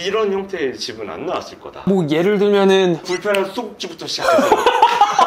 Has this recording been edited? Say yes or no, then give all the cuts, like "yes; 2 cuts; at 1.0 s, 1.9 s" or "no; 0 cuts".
no; 0 cuts